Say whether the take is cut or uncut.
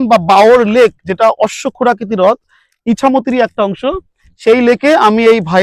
uncut